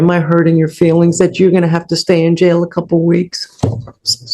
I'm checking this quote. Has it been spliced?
no; 0 cuts

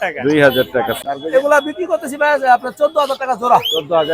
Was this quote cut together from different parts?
yes; 1 cut; at 0.9 s

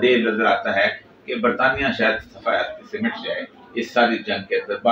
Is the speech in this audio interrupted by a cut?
no; 0 cuts

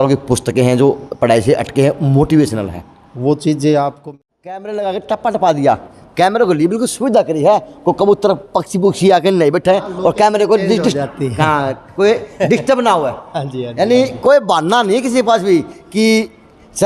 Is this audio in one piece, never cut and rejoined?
no; 1 cut; at 4.0 s

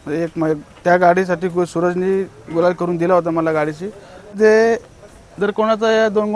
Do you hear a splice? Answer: yes; 1 cut; at 4.4 s

